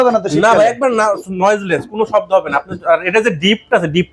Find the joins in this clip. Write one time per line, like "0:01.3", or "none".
none

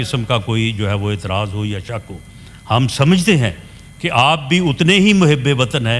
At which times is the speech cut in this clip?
none

